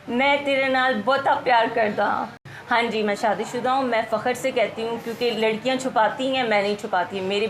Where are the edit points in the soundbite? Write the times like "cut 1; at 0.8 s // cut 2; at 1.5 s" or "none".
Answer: cut 1; at 2.3 s